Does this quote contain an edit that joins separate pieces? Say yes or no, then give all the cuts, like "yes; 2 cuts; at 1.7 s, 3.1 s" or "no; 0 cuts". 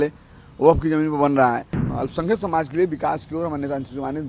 yes; 1 cut; at 1.8 s